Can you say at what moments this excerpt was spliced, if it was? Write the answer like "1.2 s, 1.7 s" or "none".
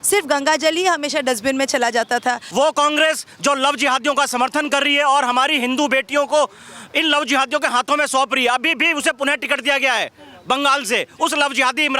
2.4 s